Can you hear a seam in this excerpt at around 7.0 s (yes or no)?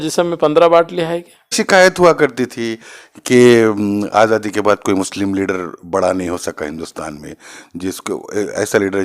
no